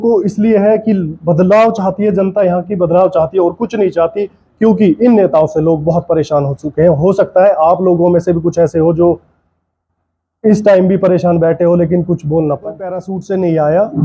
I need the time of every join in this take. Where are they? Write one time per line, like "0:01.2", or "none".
0:13.1